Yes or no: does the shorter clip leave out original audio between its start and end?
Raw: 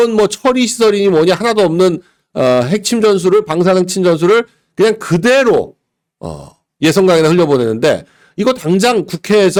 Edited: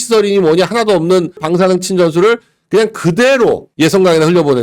yes